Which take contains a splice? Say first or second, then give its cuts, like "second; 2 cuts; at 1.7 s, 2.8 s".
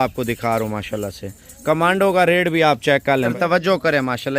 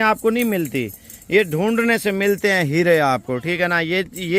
first; 1 cut; at 3.3 s